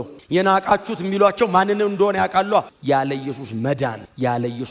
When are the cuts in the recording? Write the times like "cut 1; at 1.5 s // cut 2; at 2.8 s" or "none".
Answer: cut 1; at 2.7 s